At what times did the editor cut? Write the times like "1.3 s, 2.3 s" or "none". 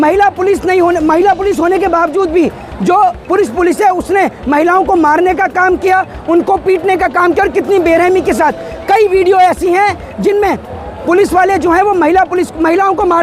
none